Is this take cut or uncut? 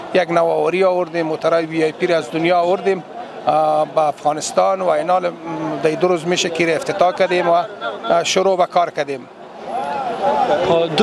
uncut